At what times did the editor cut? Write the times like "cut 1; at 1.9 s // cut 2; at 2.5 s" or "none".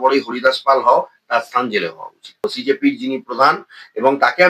cut 1; at 2.4 s